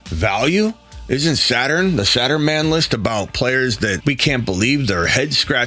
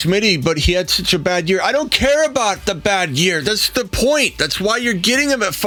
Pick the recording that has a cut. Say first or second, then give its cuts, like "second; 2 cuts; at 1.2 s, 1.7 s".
first; 1 cut; at 4.0 s